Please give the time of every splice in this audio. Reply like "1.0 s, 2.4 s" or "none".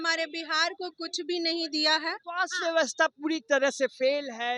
2.3 s